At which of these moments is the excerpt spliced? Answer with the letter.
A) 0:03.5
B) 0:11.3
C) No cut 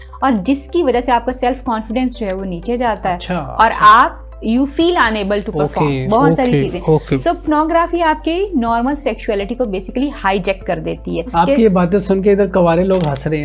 B